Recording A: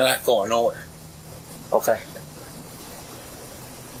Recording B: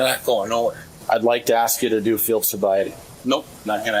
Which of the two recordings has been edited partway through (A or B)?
B